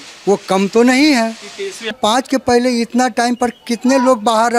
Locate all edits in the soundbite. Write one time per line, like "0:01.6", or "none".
0:01.9